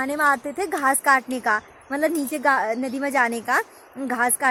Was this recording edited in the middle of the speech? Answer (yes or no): no